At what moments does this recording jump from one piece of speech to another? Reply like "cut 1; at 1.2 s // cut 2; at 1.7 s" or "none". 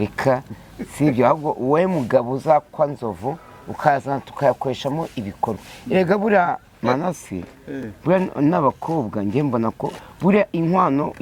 none